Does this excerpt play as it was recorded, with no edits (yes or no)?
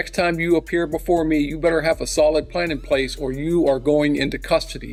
yes